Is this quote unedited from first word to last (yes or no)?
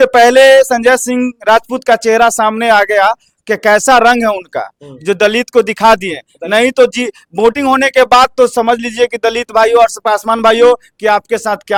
yes